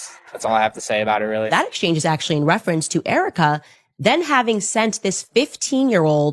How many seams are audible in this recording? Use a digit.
1